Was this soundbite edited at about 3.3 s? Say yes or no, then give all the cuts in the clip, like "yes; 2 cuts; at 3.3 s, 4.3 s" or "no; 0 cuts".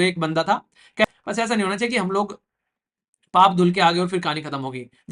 no; 1 cut; at 1.0 s